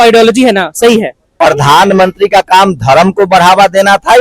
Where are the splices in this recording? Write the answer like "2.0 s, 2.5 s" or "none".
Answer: 1.2 s

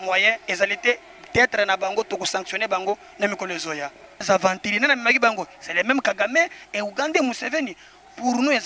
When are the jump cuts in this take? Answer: 4.2 s

